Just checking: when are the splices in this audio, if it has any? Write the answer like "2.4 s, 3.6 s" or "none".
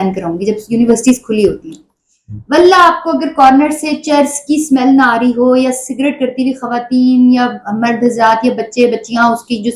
none